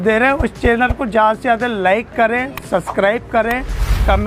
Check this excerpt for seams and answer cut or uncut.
uncut